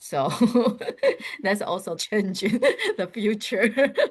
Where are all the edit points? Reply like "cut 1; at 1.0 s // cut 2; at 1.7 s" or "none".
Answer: cut 1; at 1.9 s